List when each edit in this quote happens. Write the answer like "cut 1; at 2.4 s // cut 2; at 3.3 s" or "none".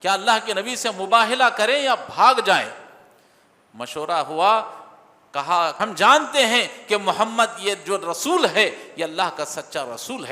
cut 1; at 5.8 s